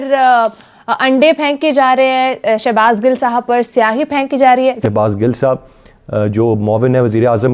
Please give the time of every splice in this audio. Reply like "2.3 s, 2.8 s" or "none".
4.8 s